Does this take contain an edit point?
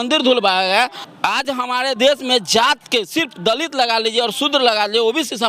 yes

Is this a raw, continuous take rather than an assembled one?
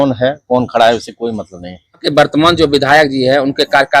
no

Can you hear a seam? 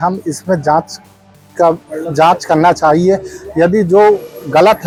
no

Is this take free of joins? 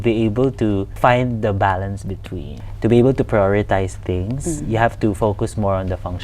no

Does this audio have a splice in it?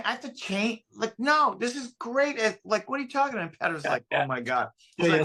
no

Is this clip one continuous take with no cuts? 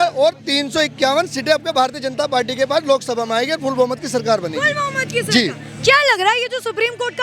yes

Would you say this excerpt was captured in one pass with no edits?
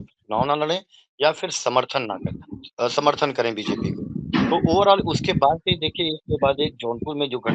yes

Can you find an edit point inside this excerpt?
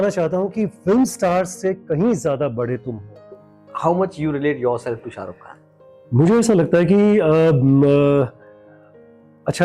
yes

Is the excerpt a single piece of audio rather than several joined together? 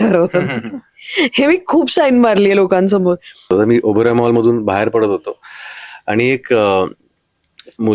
no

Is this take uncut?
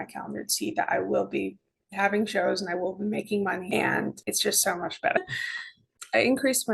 no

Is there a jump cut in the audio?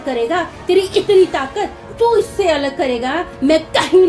no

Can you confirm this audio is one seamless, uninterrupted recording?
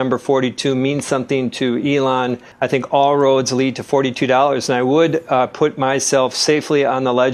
yes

